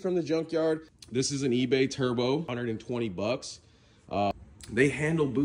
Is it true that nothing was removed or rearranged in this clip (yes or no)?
no